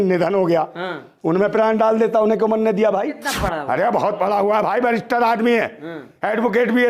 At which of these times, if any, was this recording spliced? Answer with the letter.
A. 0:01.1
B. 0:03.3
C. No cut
B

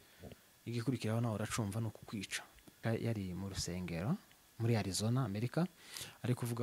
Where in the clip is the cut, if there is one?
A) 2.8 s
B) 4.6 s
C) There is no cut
A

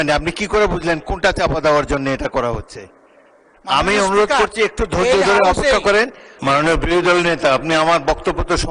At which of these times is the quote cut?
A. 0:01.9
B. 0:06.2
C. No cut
B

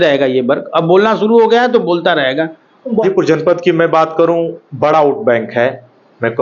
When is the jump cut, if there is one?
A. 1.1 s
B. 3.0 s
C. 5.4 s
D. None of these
B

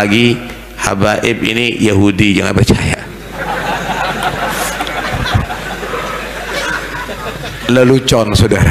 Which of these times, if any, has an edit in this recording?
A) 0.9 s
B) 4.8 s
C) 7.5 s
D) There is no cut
D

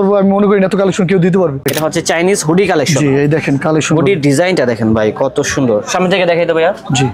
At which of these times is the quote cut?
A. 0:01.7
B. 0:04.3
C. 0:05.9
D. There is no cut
A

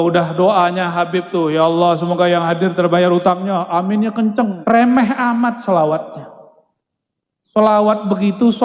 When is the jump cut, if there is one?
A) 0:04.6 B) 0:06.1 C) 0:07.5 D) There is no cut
A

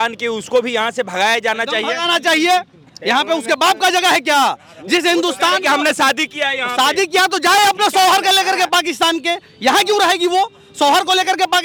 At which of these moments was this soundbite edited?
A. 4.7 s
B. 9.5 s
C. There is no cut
C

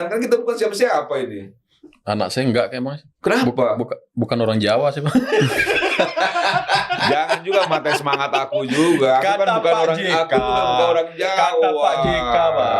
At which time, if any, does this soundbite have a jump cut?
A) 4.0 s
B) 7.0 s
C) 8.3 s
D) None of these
D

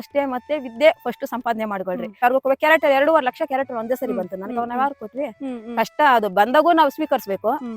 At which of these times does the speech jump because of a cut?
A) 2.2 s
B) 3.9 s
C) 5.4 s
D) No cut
A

